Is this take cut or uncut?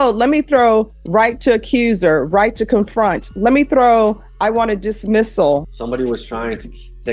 cut